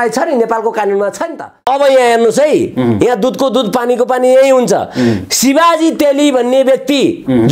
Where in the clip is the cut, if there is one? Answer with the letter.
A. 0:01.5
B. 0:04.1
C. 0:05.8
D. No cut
A